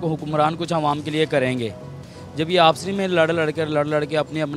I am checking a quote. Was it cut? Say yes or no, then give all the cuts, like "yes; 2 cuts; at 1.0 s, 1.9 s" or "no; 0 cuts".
no; 0 cuts